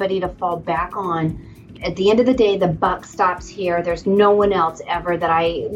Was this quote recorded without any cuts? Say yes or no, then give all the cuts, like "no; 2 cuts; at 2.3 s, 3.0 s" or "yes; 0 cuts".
no; 1 cut; at 1.7 s